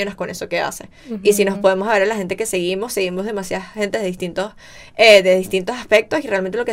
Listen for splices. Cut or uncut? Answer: uncut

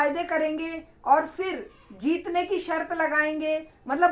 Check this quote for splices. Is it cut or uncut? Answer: uncut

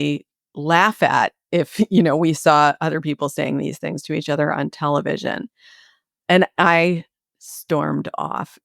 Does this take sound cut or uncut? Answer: cut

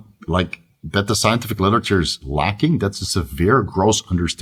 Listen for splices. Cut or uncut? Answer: uncut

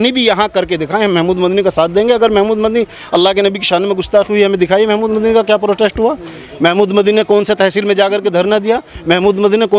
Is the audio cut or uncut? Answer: uncut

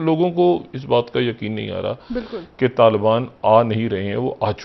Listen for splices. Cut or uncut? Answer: uncut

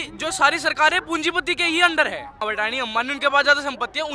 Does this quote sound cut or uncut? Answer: cut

